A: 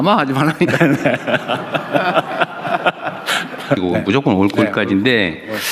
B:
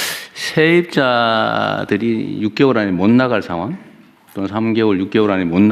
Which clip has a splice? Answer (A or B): A